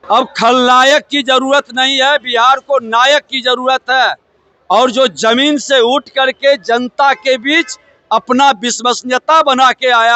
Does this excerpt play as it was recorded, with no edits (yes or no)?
yes